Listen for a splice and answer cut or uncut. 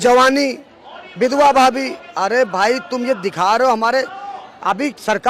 uncut